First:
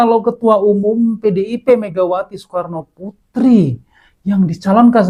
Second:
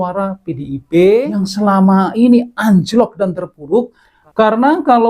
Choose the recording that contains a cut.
second; 1 cut; at 1.4 s

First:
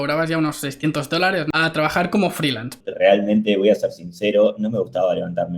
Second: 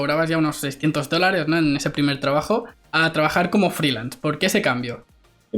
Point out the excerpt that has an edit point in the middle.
first; 2 cuts; at 1.5 s, 2.8 s

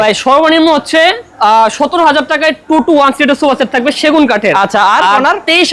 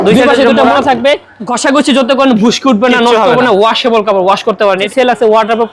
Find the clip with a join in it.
second; 2 cuts; at 1.5 s, 4.9 s

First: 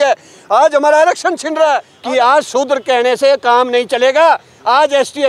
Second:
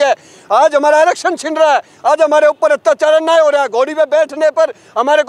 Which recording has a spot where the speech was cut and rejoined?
first; 1 cut; at 1.9 s

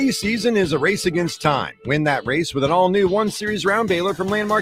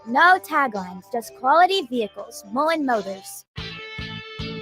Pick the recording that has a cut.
second; 1 cut; at 3.3 s

